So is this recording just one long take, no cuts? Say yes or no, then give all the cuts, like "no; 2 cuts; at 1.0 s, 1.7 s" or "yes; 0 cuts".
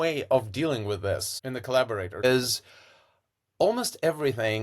no; 2 cuts; at 1.4 s, 2.2 s